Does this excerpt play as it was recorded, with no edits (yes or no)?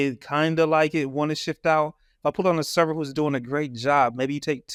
yes